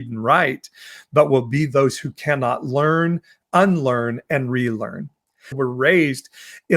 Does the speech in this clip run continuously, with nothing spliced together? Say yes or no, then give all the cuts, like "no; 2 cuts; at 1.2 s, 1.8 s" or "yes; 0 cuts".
no; 1 cut; at 5.5 s